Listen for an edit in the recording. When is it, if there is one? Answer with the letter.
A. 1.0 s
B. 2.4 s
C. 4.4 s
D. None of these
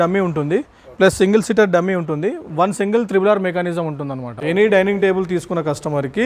C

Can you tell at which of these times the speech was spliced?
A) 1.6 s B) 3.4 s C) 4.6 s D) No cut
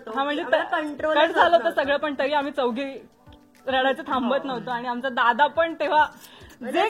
D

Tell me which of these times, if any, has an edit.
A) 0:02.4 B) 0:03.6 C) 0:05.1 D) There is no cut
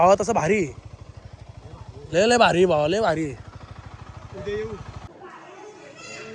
C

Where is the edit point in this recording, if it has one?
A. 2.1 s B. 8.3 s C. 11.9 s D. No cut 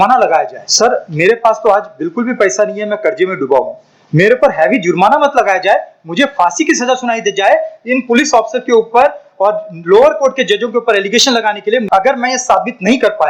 C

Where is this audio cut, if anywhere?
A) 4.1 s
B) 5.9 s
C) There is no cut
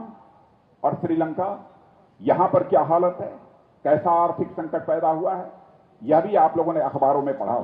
C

